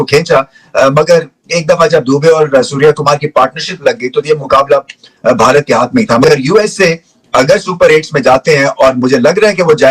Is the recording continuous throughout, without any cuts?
yes; 0 cuts

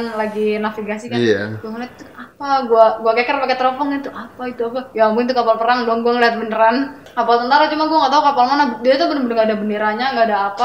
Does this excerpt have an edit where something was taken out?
yes; 1 cut; at 7.0 s

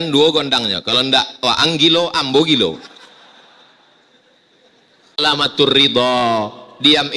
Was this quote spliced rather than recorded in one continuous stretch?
yes; 1 cut; at 5.2 s

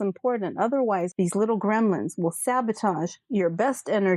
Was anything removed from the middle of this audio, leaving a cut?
yes; 1 cut; at 1.1 s

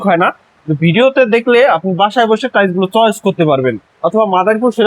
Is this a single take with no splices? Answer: no; 1 cut; at 3.9 s

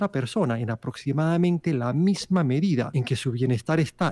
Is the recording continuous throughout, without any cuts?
no; 1 cut; at 3.0 s

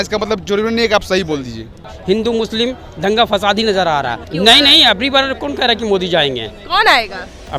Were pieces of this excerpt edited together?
yes; 2 cuts; at 1.8 s, 4.2 s

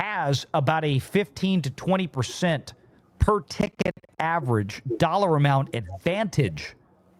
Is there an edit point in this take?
no; 0 cuts

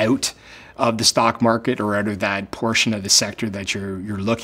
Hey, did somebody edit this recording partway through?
no; 0 cuts

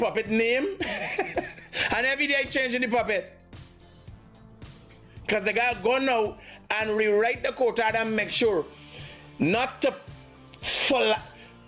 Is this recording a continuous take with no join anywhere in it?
yes; 0 cuts

